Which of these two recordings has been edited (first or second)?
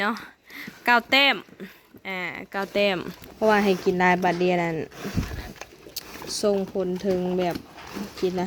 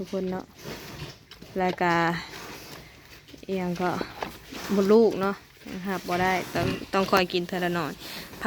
first